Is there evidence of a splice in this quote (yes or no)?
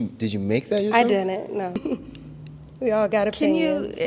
yes